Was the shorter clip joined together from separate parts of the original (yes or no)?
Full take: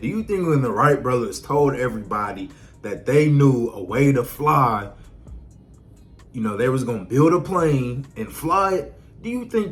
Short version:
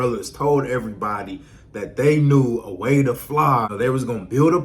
yes